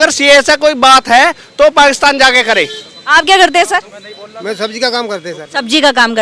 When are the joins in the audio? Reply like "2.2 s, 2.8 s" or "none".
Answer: none